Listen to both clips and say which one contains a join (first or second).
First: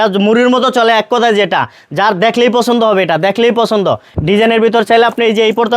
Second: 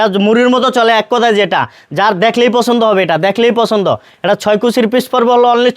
first